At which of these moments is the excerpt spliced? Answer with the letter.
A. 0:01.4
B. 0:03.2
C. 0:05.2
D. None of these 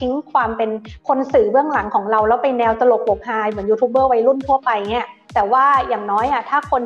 C